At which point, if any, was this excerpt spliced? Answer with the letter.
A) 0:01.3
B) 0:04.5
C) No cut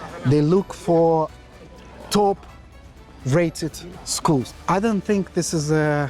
B